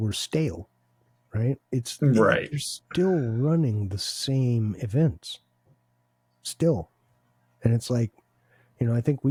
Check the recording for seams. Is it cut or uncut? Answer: uncut